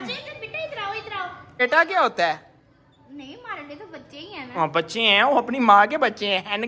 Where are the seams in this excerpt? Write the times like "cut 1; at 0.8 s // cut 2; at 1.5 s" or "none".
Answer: cut 1; at 1.6 s